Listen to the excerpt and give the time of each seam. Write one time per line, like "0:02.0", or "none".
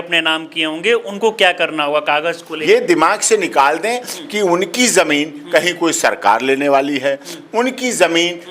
0:02.5